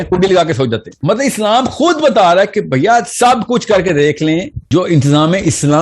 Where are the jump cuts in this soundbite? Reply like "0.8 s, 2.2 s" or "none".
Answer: 0.9 s, 4.6 s